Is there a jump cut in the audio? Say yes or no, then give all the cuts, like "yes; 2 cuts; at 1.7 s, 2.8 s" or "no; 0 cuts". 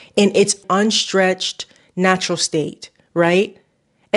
no; 0 cuts